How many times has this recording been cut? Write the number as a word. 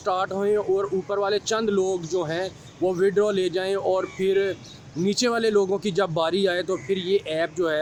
zero